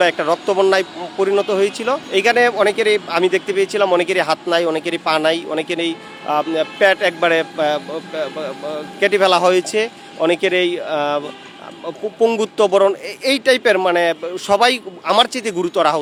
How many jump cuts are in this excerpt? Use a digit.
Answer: 0